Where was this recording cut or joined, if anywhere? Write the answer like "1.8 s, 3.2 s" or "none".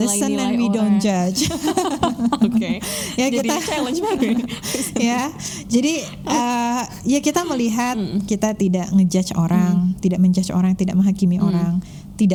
none